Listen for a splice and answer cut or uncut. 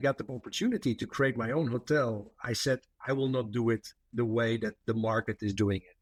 uncut